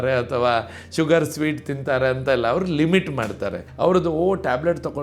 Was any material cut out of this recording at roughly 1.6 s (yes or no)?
no